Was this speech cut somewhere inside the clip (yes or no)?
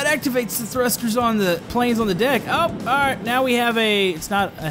yes